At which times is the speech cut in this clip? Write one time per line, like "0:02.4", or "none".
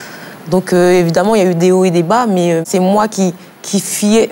0:02.7